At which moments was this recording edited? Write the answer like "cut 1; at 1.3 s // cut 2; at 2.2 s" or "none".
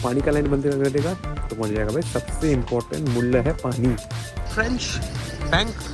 cut 1; at 4.5 s